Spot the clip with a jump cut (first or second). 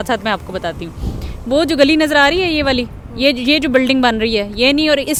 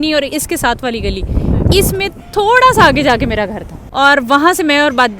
second